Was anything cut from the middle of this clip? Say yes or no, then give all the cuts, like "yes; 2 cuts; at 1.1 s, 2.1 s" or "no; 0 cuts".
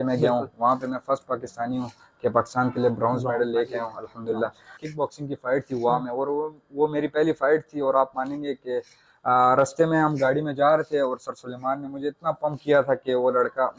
yes; 1 cut; at 4.8 s